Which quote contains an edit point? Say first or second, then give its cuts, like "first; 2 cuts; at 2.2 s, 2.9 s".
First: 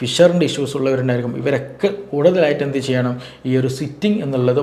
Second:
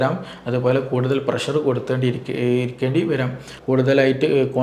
second; 1 cut; at 3.5 s